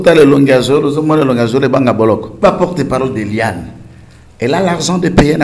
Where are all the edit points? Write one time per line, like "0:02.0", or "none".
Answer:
0:02.4